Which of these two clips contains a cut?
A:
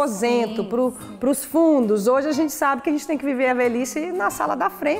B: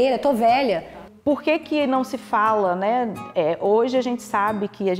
B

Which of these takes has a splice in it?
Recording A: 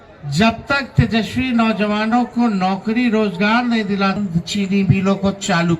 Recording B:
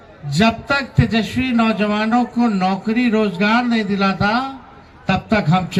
A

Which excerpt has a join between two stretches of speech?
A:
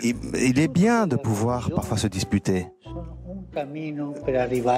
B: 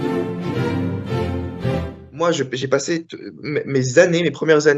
B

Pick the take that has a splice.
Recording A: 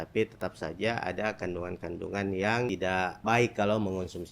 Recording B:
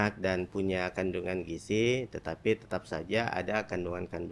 A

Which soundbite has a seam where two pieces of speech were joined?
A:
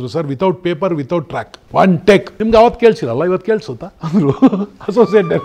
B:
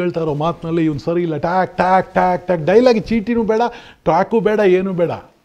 A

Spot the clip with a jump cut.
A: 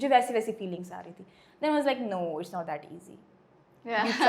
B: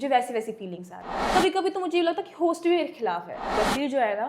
B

